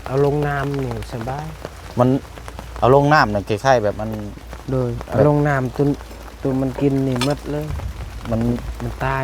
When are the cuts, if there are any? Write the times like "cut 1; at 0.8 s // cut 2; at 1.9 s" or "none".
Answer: none